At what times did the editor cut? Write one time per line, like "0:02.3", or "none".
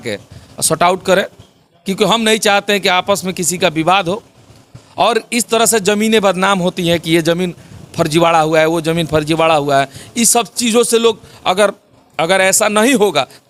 none